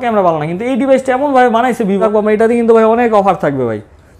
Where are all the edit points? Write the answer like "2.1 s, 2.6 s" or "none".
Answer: 2.0 s